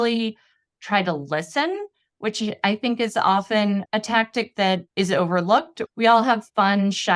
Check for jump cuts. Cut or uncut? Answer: cut